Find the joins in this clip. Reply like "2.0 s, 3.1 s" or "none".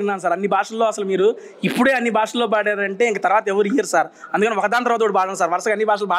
none